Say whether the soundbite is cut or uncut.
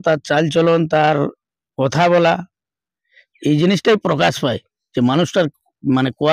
uncut